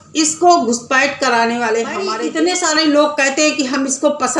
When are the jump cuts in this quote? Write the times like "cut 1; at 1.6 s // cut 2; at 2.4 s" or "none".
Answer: cut 1; at 2.2 s